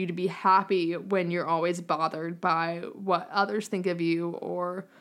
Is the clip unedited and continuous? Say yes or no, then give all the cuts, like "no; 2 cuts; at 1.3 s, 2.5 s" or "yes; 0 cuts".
yes; 0 cuts